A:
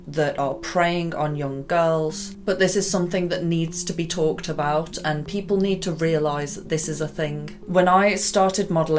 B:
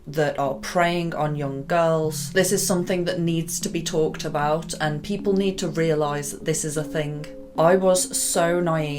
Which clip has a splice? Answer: B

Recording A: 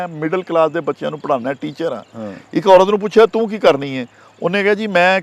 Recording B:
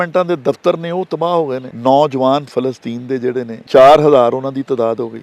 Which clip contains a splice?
B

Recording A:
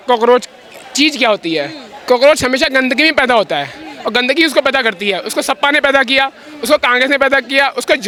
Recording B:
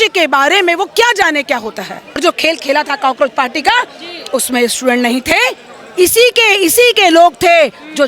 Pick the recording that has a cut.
B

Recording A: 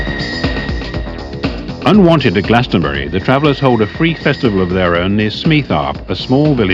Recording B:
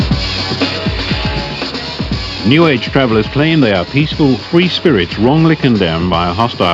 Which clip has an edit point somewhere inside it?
A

